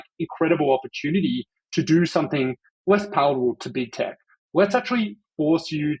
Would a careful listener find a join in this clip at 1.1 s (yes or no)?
no